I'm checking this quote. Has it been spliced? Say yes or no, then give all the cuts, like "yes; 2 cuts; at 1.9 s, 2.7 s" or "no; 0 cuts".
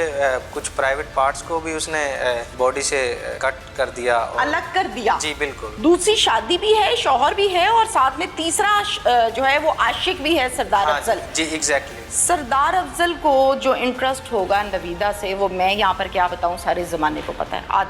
yes; 3 cuts; at 2.5 s, 3.3 s, 5.6 s